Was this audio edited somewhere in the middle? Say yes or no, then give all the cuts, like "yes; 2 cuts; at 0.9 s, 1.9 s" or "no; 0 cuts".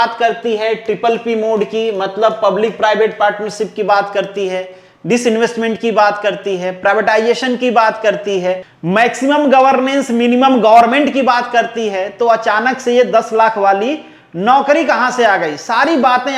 no; 0 cuts